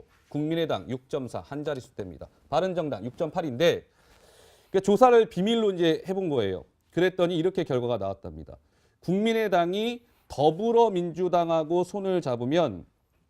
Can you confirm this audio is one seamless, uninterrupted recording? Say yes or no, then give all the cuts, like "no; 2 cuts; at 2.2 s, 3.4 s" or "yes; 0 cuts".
no; 1 cut; at 5.9 s